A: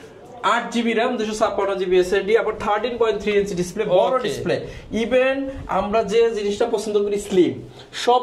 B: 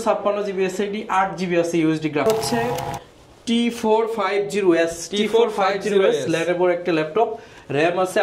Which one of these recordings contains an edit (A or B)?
B